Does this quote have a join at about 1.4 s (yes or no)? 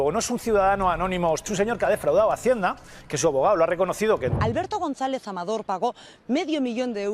yes